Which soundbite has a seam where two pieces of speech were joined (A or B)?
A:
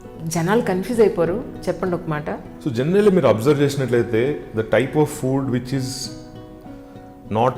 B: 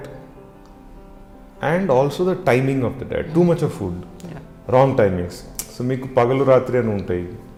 A